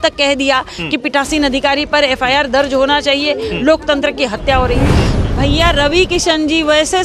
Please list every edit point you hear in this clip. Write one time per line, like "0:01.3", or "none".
0:05.0